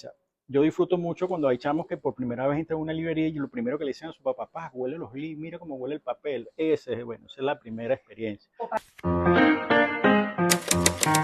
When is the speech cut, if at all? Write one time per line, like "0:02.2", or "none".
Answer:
0:08.8